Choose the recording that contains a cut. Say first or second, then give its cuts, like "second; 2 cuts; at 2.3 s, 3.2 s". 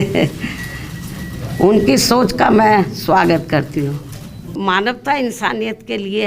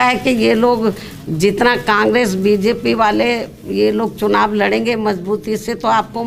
first; 1 cut; at 4.5 s